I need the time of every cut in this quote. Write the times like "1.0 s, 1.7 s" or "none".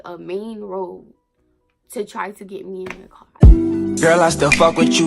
3.5 s